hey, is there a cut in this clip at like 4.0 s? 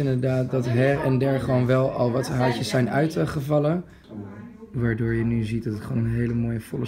yes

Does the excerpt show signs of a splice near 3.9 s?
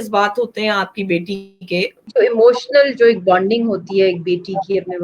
no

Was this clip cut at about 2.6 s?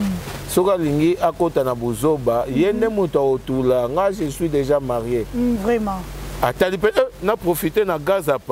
no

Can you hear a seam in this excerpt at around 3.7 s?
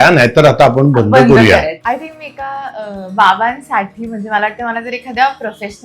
no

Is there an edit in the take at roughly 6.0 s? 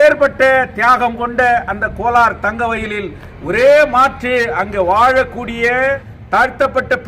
no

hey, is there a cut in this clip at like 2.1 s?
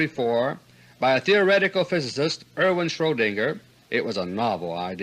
yes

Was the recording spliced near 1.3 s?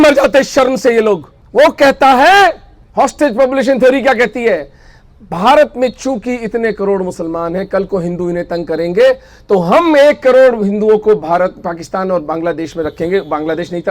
yes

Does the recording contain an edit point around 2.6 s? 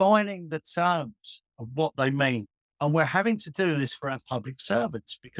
yes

